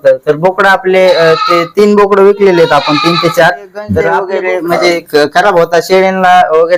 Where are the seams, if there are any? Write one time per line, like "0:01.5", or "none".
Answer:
0:04.2